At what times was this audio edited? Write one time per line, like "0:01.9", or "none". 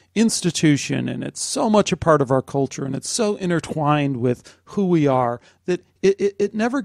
none

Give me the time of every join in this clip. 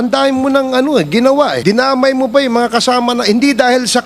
0:01.6

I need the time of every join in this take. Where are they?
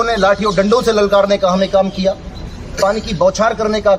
none

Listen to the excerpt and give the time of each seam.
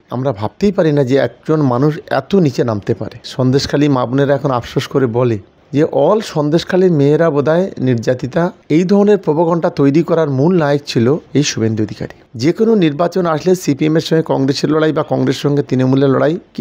0:03.2
0:05.6
0:08.6
0:12.2

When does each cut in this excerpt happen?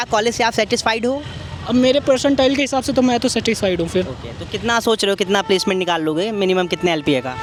none

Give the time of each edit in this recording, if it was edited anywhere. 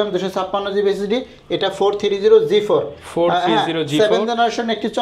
none

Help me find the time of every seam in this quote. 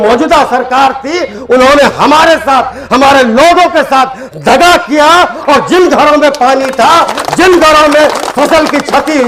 none

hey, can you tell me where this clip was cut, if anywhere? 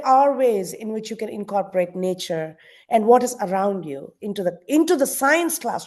none

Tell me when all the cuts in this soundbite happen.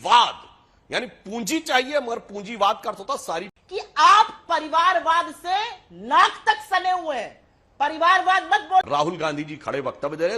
0:03.6
0:08.8

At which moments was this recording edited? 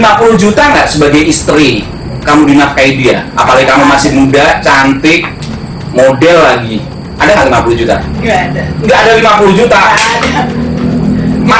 none

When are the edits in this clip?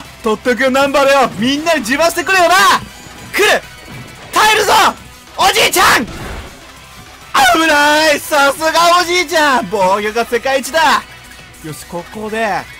none

